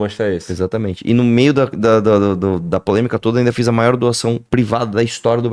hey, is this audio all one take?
no; 1 cut; at 4.4 s

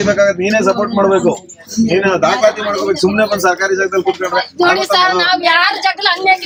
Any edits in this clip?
no; 0 cuts

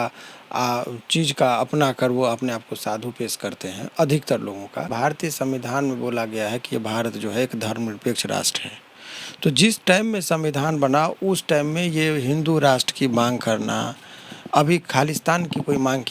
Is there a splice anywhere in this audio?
yes; 1 cut; at 4.9 s

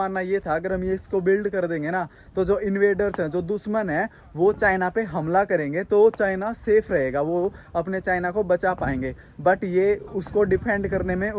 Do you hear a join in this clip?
no; 0 cuts

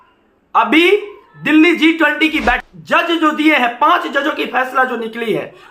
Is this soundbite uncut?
no; 1 cut; at 2.7 s

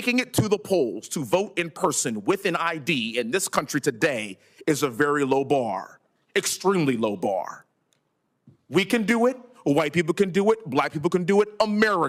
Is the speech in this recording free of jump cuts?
yes; 0 cuts

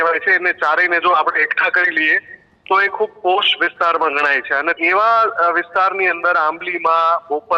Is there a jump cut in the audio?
yes; 1 cut; at 4.8 s

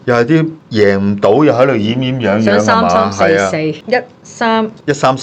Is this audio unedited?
no; 1 cut; at 3.8 s

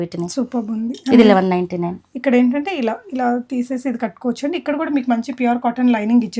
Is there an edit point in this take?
no; 0 cuts

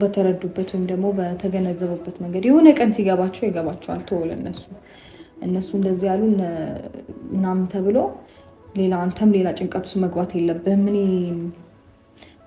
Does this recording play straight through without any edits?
yes; 0 cuts

